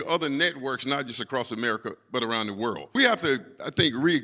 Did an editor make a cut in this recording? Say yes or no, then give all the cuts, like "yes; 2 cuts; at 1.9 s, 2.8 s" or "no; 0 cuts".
yes; 1 cut; at 2.9 s